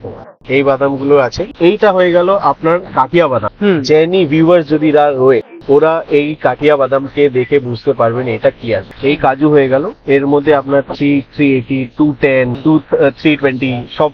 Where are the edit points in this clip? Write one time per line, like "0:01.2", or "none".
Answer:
0:01.5
0:03.5
0:08.9
0:12.5